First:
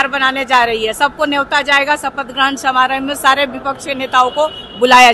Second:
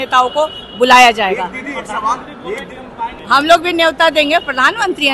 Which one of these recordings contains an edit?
second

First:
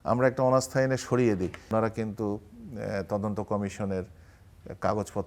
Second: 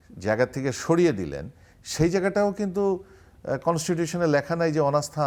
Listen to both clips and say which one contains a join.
first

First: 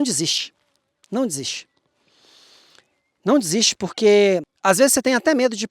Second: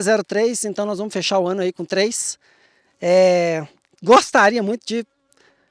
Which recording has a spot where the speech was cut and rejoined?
first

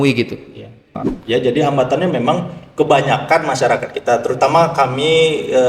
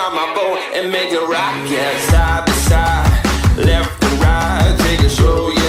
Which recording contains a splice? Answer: first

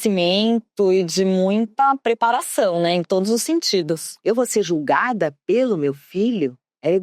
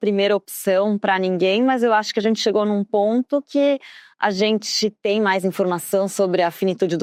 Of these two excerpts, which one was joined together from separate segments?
first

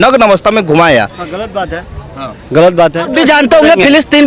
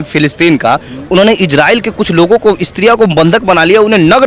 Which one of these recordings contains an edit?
first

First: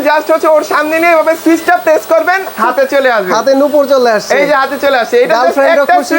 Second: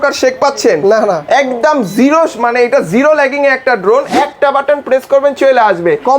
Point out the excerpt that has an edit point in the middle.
second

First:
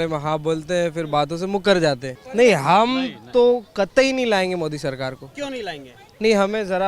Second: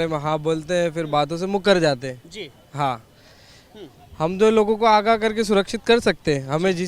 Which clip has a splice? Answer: first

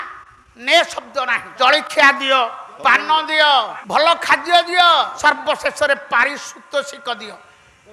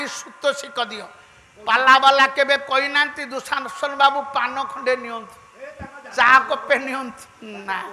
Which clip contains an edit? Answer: first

